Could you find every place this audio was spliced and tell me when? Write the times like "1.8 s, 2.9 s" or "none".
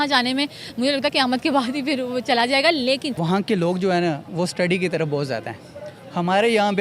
3.1 s